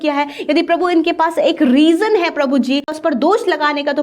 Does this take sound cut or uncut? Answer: cut